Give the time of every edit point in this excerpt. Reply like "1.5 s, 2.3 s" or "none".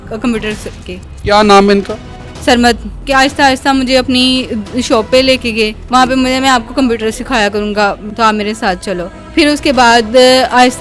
3.0 s, 5.8 s, 8.1 s, 9.2 s